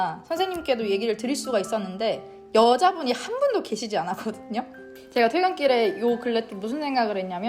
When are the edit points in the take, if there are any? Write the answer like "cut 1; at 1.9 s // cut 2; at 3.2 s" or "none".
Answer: cut 1; at 4.9 s